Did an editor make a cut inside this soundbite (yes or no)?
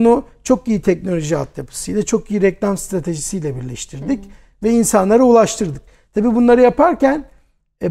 no